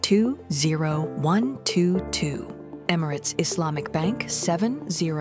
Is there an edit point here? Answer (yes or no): yes